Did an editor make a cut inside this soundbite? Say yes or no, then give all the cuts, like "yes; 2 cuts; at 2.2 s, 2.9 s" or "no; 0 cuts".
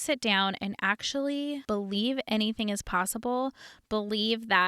yes; 1 cut; at 1.6 s